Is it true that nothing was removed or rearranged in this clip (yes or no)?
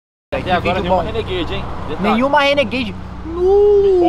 yes